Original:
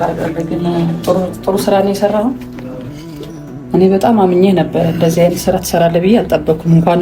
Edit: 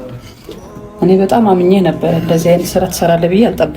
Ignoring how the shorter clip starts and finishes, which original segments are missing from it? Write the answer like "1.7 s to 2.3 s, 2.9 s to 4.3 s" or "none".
none